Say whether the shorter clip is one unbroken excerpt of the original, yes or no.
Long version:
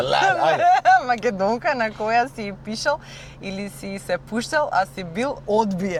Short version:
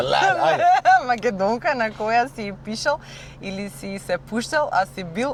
yes